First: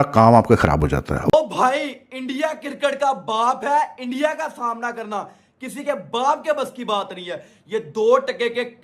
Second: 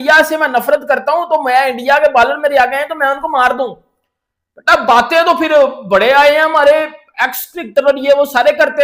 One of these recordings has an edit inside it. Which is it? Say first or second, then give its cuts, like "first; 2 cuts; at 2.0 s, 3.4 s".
first; 1 cut; at 1.1 s